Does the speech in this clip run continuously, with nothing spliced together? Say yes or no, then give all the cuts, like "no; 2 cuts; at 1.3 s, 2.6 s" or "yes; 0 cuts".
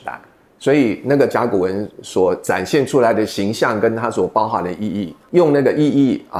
no; 1 cut; at 5.2 s